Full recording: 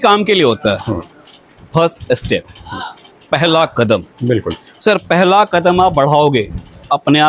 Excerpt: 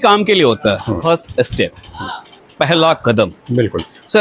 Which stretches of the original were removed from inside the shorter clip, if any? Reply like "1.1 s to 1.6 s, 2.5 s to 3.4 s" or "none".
1.0 s to 1.7 s